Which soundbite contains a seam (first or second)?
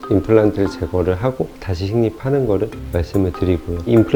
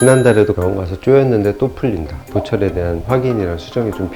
second